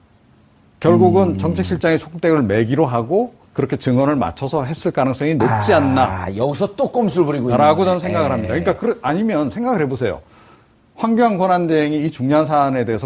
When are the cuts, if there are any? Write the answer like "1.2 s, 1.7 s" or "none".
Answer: none